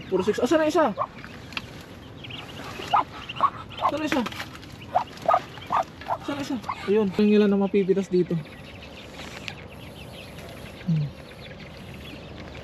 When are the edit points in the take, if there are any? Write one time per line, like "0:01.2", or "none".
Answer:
0:07.2